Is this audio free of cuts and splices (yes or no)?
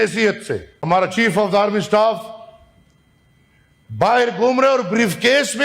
no